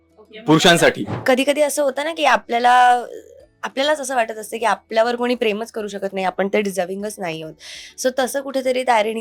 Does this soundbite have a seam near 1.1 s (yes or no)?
yes